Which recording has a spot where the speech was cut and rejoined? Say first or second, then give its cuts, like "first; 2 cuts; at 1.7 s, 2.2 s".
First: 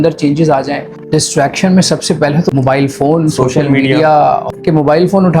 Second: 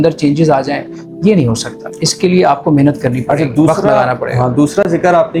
first; 3 cuts; at 0.9 s, 2.5 s, 4.5 s